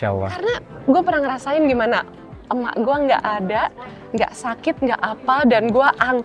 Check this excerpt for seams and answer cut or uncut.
uncut